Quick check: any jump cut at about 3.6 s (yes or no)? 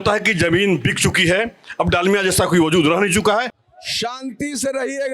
yes